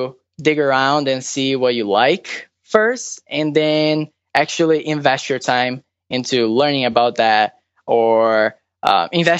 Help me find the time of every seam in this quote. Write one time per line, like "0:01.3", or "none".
none